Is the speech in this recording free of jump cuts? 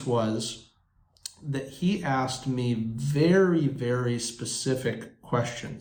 yes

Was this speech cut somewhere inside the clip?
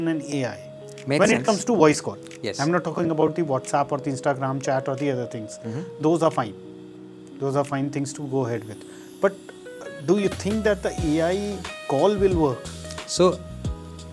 no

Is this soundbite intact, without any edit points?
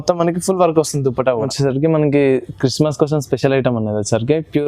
no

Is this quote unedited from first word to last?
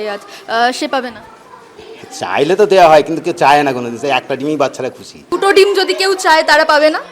no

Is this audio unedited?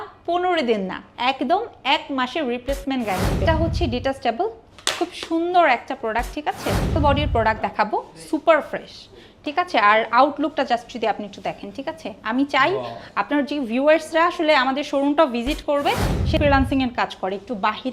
no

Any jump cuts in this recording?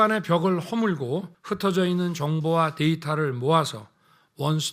yes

